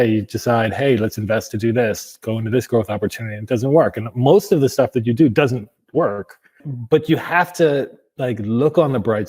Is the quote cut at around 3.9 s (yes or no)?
no